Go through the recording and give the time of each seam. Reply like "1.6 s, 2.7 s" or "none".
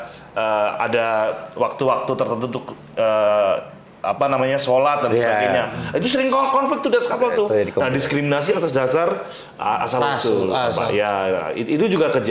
none